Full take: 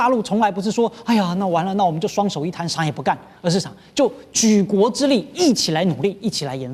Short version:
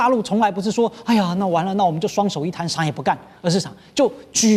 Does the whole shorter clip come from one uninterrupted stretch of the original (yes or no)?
yes